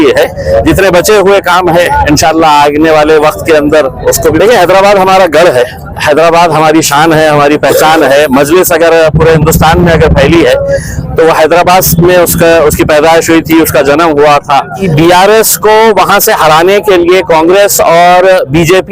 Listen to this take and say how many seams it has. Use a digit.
2